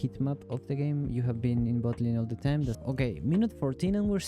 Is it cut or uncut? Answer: cut